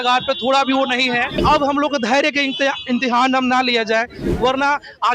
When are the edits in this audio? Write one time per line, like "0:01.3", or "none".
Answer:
0:01.3